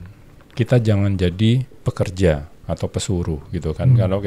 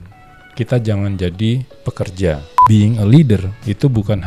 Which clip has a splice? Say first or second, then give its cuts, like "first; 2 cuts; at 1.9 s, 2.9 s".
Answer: second; 1 cut; at 2.5 s